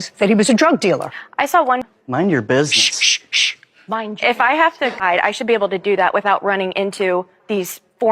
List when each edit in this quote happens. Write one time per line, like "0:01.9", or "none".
0:01.9
0:05.0